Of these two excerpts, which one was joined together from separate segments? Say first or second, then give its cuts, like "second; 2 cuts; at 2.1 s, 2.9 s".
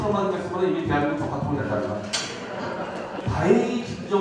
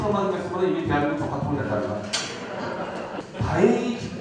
first; 1 cut; at 3.2 s